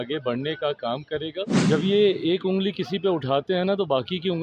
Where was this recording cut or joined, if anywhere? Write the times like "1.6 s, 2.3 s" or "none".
1.6 s